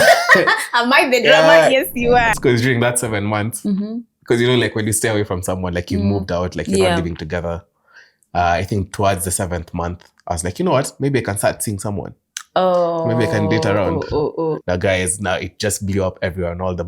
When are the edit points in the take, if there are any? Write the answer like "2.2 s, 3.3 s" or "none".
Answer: 2.2 s, 14.6 s

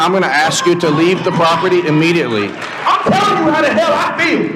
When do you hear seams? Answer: 2.7 s

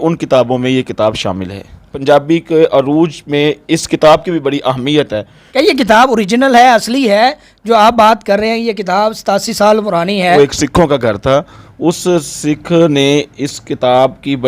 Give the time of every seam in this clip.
1.9 s, 5.4 s, 10.2 s

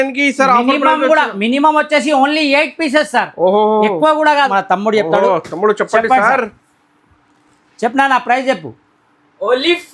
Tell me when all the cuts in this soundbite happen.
4.5 s

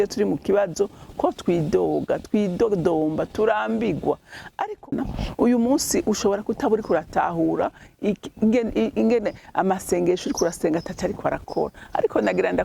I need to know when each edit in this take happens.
4.8 s

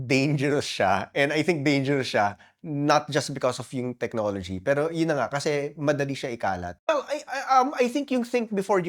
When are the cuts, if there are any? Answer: 6.7 s

